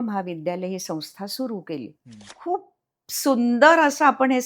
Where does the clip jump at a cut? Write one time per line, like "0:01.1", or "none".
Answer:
0:02.3

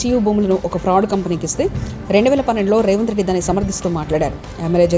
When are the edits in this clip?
none

